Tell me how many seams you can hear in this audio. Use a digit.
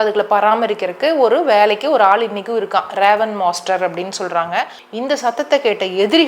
1